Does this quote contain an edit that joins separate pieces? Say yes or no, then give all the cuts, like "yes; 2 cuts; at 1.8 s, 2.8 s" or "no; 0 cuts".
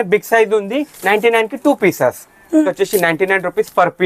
yes; 1 cut; at 2.6 s